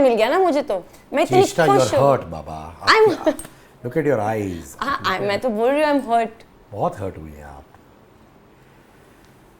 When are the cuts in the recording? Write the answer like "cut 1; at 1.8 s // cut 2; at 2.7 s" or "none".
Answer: none